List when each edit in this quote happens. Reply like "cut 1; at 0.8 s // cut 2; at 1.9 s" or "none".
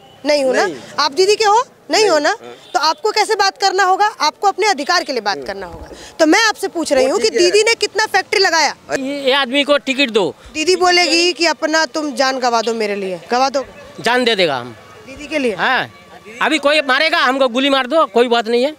cut 1; at 8.9 s